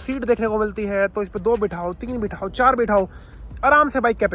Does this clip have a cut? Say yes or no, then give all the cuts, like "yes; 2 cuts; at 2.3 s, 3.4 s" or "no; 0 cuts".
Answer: no; 0 cuts